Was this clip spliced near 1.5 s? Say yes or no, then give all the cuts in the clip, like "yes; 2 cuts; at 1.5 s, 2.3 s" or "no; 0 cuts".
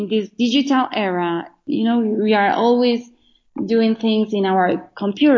yes; 1 cut; at 1.5 s